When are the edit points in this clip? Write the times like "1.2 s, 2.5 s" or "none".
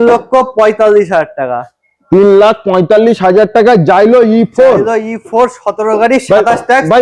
none